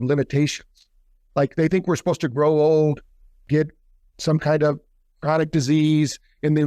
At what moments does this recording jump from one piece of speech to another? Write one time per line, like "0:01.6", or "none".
0:03.5